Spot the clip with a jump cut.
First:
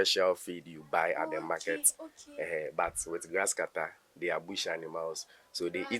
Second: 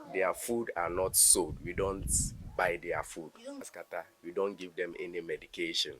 second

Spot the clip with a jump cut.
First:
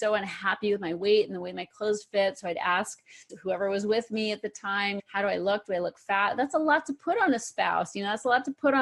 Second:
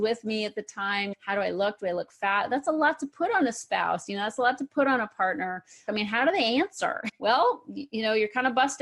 second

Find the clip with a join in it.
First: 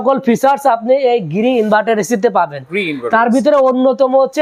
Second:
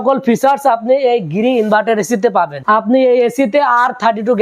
second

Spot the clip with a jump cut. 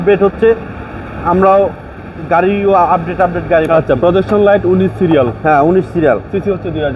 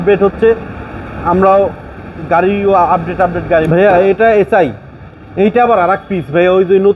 second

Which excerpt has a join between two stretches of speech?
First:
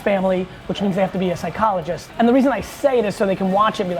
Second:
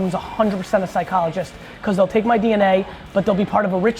first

